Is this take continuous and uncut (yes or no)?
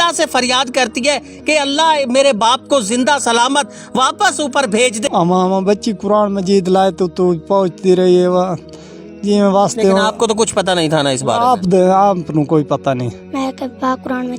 no